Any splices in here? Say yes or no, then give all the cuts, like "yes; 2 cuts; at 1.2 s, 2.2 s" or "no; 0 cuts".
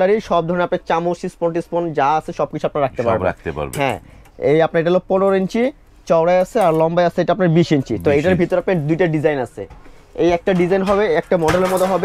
no; 0 cuts